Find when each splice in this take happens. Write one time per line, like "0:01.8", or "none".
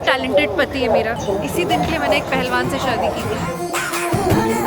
0:01.1